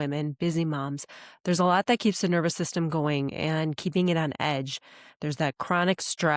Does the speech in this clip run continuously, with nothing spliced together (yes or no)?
yes